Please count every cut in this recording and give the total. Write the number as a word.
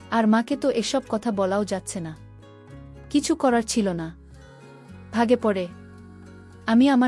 zero